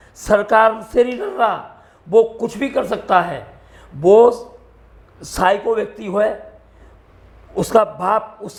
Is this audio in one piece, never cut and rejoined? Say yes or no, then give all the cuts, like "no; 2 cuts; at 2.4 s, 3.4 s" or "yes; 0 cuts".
yes; 0 cuts